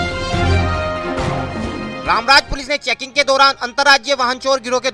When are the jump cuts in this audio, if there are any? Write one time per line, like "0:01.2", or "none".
0:01.9